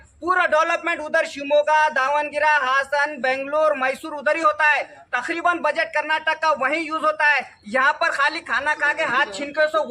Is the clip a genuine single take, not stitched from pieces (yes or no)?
yes